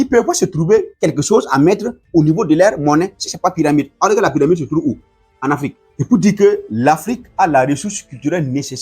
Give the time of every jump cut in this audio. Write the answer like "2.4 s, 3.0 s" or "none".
0.9 s, 5.9 s